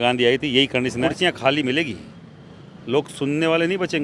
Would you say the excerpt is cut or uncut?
cut